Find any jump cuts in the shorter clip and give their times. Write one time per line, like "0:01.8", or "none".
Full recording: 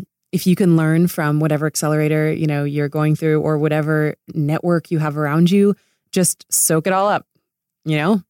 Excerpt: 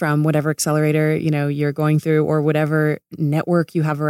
none